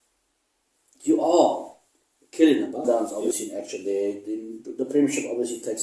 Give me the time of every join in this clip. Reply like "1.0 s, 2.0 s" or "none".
2.8 s